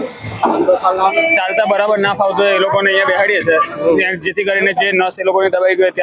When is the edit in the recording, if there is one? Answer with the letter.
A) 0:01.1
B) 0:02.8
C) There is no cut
A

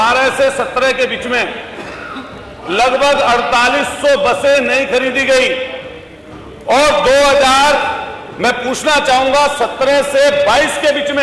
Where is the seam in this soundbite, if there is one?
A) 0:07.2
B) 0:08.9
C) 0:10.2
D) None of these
D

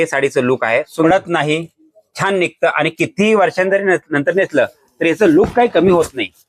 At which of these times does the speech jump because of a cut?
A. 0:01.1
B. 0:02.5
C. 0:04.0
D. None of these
A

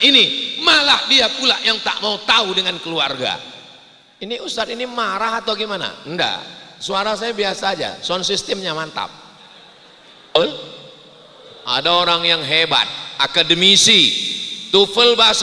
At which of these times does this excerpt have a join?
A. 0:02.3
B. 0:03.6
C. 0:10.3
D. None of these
C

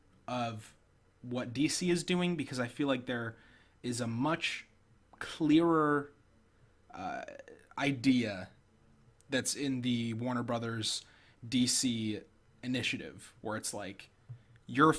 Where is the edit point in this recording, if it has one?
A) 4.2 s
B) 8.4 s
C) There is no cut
B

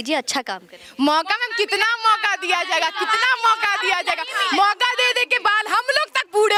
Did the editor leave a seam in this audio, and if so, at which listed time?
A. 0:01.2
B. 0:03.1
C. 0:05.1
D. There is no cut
D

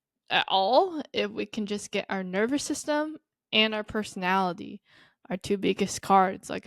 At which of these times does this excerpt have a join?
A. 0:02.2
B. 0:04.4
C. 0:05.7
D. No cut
D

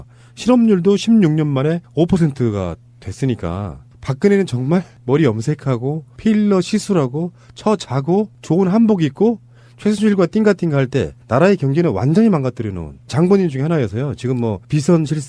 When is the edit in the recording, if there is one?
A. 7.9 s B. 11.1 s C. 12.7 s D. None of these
C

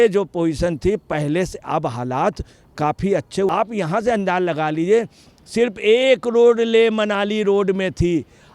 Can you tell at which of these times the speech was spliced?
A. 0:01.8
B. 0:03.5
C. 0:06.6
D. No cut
B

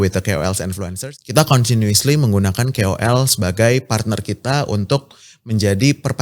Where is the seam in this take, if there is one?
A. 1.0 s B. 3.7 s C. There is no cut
A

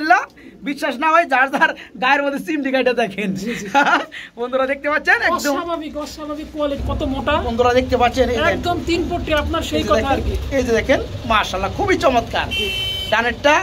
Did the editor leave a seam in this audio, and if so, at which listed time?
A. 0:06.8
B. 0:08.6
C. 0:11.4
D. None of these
A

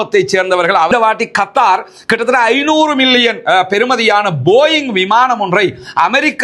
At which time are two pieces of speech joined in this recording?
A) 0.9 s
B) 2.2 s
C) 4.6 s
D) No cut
A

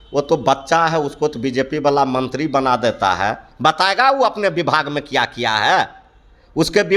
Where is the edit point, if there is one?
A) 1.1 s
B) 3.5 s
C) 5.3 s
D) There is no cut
B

